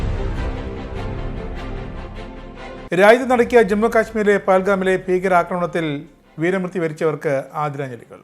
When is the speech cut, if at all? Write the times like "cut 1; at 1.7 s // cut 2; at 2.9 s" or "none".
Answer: cut 1; at 2.9 s